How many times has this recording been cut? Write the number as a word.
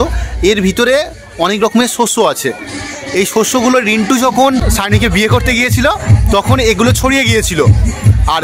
zero